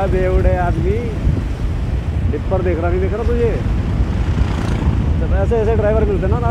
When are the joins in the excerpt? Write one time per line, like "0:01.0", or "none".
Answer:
none